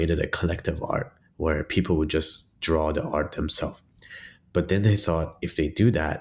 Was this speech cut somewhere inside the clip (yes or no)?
no